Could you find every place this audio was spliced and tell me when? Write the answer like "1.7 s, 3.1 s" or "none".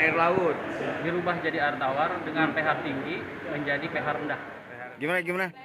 4.5 s